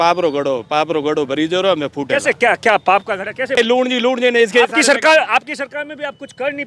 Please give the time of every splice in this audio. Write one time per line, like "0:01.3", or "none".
0:03.6